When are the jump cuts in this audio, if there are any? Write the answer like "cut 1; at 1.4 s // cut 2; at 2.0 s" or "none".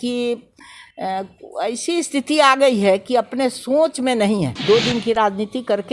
cut 1; at 4.5 s